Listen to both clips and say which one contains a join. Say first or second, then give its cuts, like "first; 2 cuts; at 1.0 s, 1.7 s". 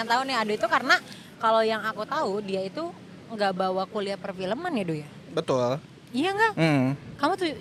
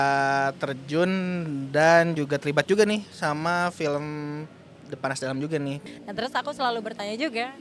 second; 1 cut; at 5.8 s